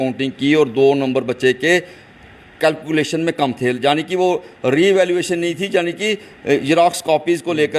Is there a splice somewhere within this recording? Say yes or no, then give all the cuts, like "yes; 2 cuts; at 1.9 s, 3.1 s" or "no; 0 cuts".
no; 0 cuts